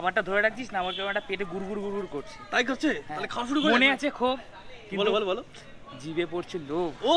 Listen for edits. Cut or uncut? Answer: uncut